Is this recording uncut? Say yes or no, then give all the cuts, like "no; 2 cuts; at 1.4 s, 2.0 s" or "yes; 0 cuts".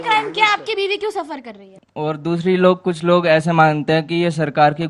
no; 1 cut; at 1.8 s